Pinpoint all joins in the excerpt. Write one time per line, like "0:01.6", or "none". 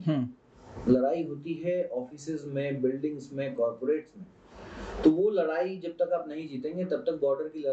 none

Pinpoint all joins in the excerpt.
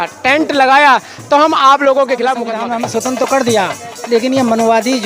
0:02.6

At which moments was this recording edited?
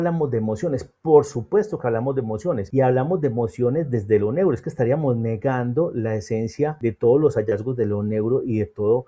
0:02.6
0:06.8

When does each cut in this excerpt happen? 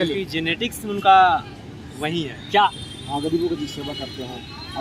0:02.7

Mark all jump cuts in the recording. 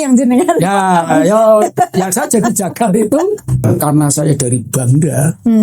0:03.7

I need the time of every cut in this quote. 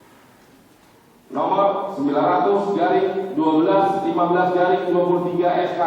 none

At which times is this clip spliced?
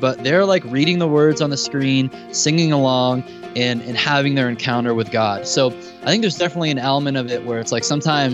none

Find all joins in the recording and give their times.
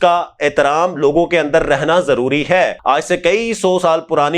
0:02.8

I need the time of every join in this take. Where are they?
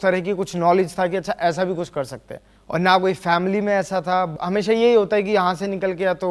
0:04.3

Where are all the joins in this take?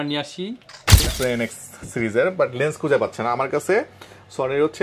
0:01.1

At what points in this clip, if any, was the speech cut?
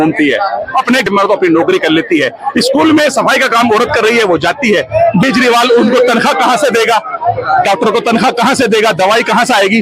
0:01.1
0:05.2

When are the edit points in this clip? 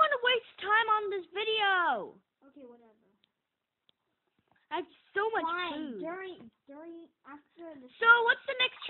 none

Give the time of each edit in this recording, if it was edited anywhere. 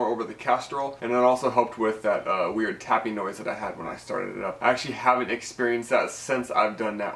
0:00.9
0:04.6

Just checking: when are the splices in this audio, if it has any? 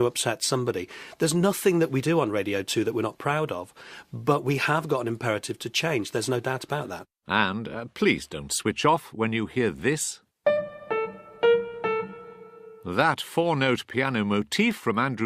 0:07.0

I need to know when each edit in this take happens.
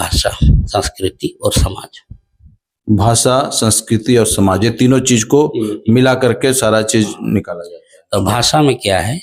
none

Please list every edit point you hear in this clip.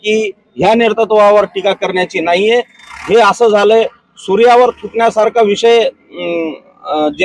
none

